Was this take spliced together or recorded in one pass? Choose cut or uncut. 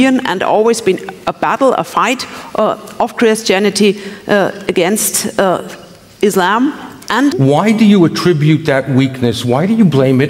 cut